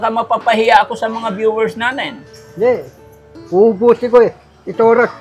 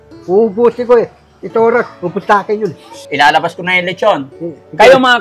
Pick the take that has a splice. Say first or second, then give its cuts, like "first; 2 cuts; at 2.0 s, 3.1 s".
second; 1 cut; at 3.0 s